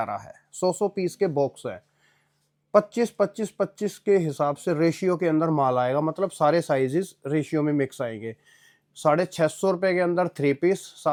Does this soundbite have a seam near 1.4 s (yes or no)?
no